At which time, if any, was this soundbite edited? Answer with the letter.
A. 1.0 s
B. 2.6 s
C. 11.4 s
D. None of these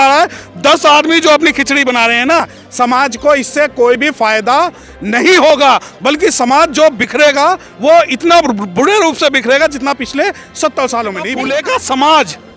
C